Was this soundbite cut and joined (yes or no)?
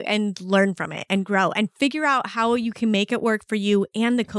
no